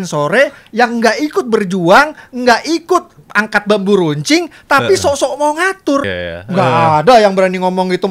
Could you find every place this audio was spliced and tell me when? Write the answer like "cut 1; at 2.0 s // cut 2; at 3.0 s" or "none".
cut 1; at 6.1 s